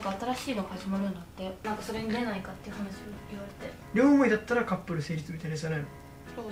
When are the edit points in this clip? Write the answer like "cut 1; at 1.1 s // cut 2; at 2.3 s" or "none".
cut 1; at 1.6 s // cut 2; at 3.9 s